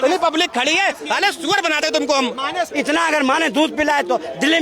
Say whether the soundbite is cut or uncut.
cut